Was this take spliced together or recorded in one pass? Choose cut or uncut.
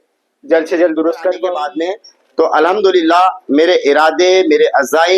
cut